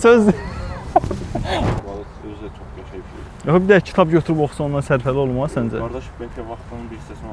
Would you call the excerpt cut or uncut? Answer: cut